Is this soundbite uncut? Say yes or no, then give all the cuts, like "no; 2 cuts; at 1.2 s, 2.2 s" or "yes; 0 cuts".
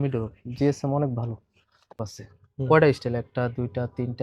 no; 1 cut; at 2.0 s